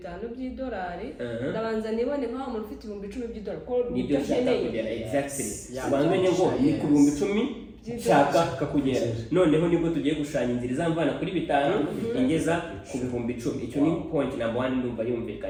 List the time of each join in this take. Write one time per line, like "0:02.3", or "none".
none